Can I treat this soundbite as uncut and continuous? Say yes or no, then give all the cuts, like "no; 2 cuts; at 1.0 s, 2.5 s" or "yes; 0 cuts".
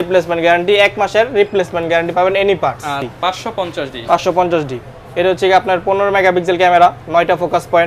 no; 1 cut; at 3.1 s